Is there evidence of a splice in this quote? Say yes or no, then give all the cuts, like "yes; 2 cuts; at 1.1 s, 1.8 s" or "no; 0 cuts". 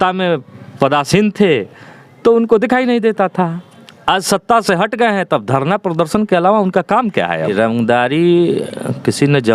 yes; 1 cut; at 7.5 s